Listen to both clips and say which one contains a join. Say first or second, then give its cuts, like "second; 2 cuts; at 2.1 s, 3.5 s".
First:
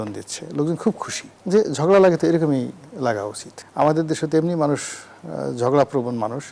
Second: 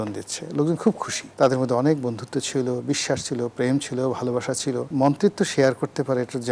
second; 2 cuts; at 1.3 s, 4.9 s